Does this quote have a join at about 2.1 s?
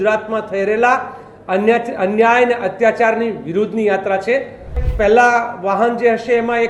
no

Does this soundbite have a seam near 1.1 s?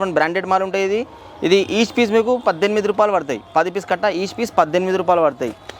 no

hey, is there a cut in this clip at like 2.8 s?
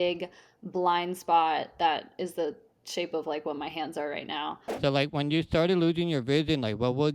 no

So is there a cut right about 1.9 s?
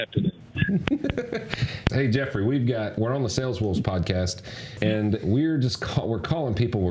yes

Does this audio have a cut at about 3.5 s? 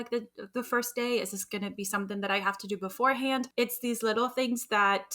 yes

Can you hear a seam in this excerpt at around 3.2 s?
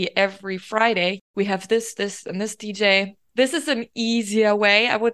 yes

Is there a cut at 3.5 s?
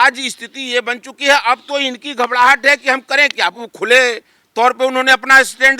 yes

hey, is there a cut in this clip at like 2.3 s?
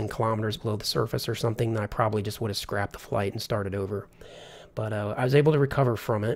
yes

